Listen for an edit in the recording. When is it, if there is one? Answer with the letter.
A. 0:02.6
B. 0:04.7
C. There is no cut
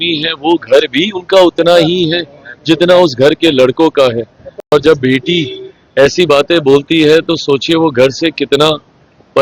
B